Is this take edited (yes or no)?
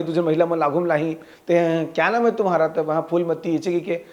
no